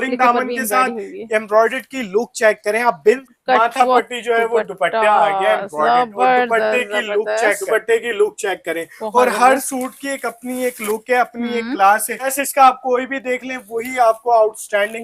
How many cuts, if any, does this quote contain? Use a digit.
3